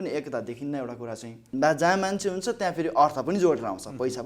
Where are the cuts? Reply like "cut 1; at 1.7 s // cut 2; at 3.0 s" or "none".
cut 1; at 1.5 s